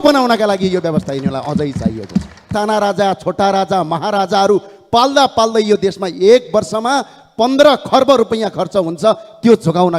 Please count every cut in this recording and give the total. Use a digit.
1